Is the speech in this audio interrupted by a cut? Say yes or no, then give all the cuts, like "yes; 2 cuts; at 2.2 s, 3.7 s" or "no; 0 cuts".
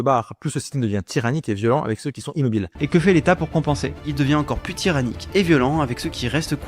yes; 2 cuts; at 2.8 s, 3.9 s